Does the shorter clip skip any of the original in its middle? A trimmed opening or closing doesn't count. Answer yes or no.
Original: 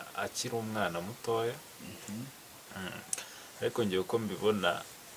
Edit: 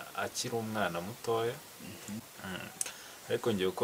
yes